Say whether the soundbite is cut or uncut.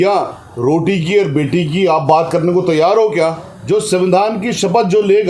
cut